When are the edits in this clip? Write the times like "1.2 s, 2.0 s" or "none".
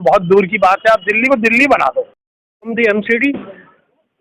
2.7 s